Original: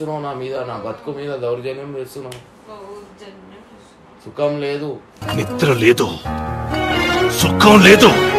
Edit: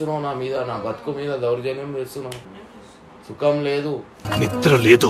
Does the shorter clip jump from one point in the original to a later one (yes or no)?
yes